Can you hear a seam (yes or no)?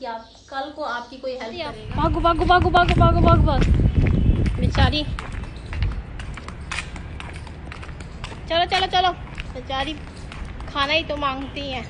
yes